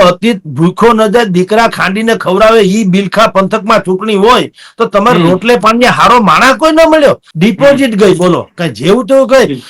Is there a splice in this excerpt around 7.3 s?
yes; 1 cut; at 7.3 s

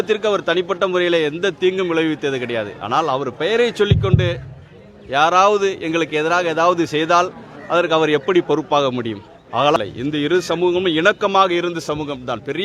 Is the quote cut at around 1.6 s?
no; 1 cut; at 9.8 s

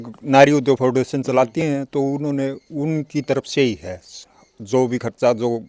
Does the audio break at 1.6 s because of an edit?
no; 0 cuts

